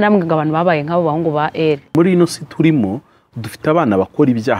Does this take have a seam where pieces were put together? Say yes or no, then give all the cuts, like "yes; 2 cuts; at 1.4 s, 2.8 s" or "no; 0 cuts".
yes; 1 cut; at 1.9 s